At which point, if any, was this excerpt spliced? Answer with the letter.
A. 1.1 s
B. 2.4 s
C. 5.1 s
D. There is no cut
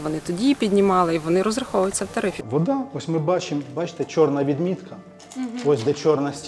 B